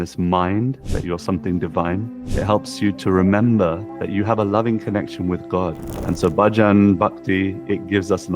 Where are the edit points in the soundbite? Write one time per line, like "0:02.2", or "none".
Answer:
0:00.9
0:02.2
0:03.9
0:05.9